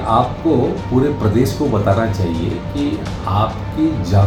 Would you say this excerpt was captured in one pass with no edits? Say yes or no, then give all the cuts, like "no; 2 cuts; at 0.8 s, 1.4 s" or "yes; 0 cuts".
yes; 0 cuts